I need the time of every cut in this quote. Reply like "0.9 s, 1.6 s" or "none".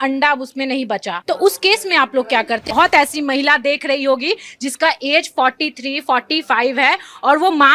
2.7 s